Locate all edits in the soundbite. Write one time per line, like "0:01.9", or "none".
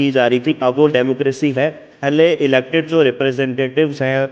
0:02.0